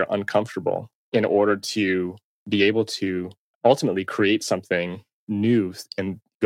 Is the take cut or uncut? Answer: cut